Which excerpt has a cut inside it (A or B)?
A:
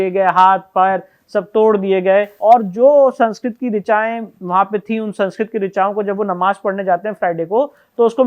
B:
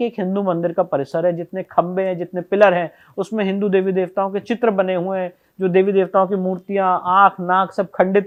A